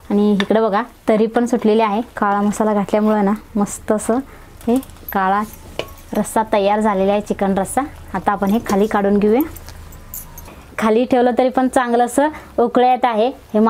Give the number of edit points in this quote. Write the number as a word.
two